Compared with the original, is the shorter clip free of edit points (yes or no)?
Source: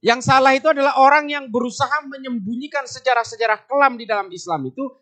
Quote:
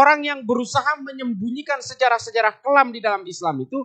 yes